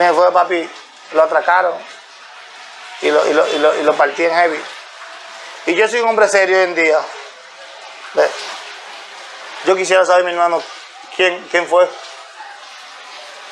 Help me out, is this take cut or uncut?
uncut